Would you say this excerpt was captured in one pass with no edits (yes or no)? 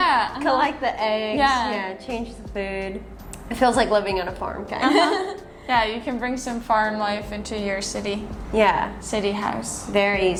yes